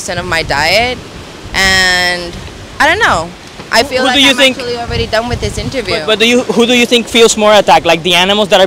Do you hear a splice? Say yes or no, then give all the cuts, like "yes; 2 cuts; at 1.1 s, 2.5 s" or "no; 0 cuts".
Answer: no; 0 cuts